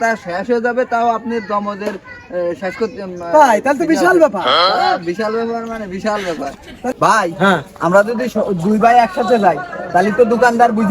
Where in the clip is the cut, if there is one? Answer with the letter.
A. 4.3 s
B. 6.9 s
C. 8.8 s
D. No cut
B